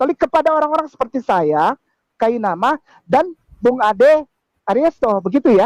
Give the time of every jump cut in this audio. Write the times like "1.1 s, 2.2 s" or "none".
none